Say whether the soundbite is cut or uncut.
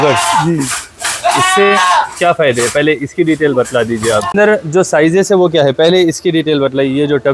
cut